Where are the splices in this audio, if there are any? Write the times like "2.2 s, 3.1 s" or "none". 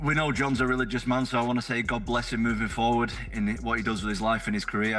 none